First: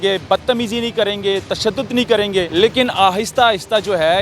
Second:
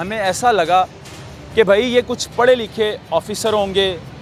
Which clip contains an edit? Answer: first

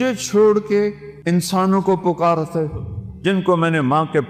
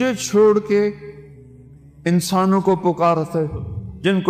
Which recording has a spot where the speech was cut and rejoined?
first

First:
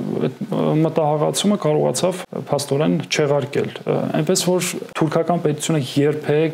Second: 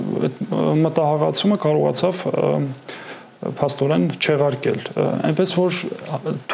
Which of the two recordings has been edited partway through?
first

